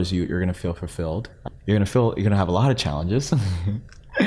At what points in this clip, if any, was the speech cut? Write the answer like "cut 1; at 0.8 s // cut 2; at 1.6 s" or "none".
cut 1; at 1.4 s